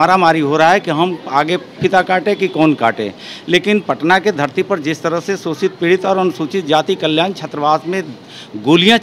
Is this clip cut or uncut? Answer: uncut